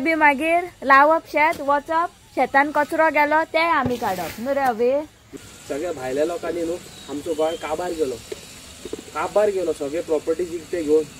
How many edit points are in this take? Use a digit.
1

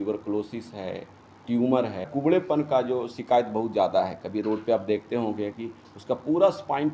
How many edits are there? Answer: 1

